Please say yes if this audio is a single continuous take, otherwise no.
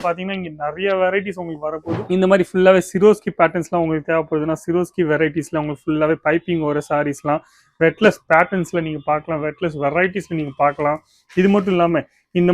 no